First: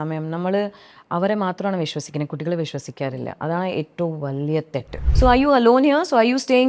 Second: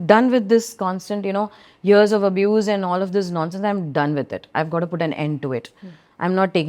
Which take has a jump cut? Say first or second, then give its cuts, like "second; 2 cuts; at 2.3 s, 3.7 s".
first; 1 cut; at 5.1 s